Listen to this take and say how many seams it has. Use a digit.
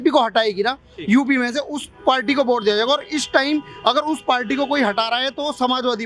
0